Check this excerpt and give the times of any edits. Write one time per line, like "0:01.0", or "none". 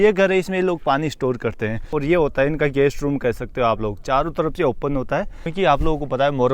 0:01.9
0:05.5